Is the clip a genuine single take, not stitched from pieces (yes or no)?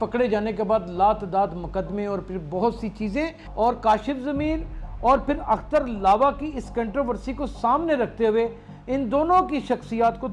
no